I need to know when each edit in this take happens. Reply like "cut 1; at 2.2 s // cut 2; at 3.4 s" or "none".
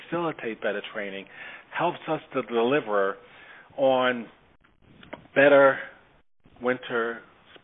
none